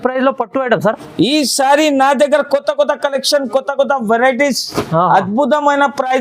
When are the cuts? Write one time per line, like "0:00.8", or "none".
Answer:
none